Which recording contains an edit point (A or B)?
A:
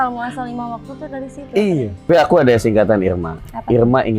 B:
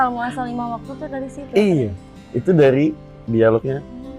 A